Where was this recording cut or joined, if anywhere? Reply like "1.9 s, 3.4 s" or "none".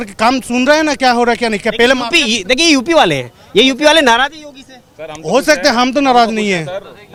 none